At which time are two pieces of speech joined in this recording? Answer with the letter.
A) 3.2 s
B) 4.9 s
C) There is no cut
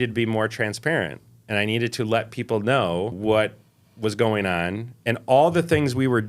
A